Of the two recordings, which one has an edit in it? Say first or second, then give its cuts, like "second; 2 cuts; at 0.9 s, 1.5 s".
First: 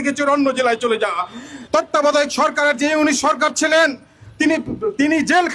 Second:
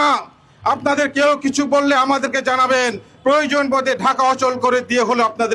first; 1 cut; at 1.6 s